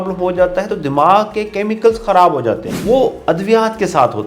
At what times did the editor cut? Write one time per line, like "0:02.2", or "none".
0:02.7